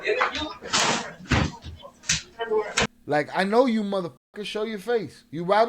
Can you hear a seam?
yes; 1 cut; at 3.0 s

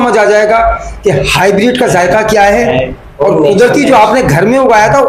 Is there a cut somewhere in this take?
no; 0 cuts

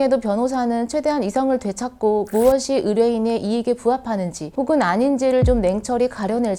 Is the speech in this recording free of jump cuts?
yes; 0 cuts

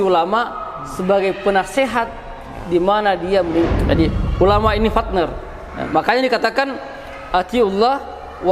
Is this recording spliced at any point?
yes; 1 cut; at 3.8 s

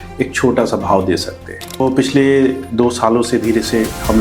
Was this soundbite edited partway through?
yes; 1 cut; at 1.8 s

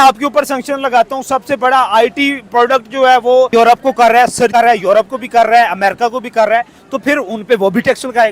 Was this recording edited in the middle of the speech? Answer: yes; 1 cut; at 3.5 s

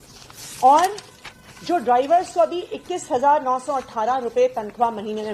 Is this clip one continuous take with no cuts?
yes; 0 cuts

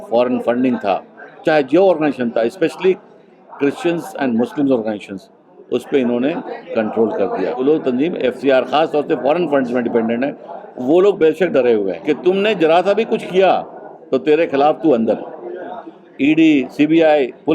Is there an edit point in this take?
yes; 2 cuts; at 7.6 s, 12.0 s

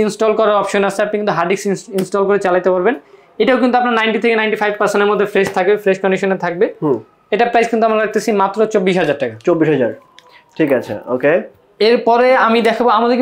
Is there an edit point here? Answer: no; 0 cuts

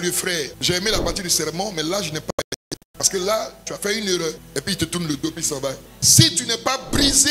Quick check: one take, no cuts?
no; 1 cut; at 4.4 s

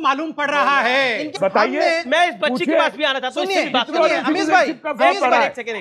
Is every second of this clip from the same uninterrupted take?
yes; 0 cuts

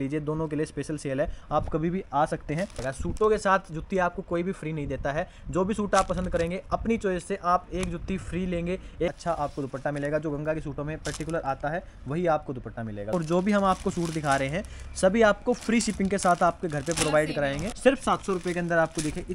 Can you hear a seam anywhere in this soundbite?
yes; 4 cuts; at 2.8 s, 9.1 s, 13.1 s, 17.7 s

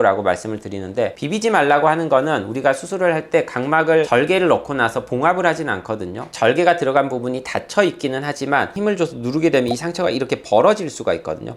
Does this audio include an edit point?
yes; 1 cut; at 1.2 s

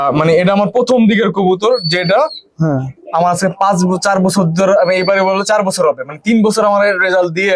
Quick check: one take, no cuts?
yes; 0 cuts

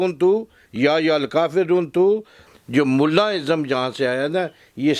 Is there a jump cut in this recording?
yes; 1 cut; at 2.4 s

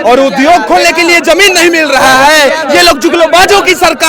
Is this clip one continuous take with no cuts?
yes; 0 cuts

